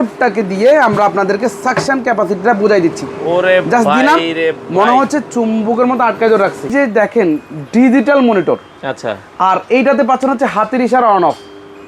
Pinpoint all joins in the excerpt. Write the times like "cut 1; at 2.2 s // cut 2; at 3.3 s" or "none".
cut 1; at 6.7 s